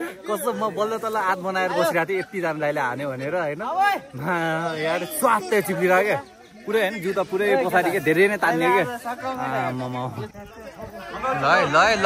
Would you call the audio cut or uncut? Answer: uncut